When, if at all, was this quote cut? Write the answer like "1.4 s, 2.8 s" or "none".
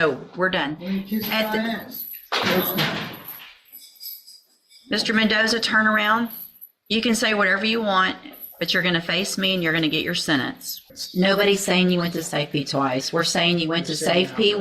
10.9 s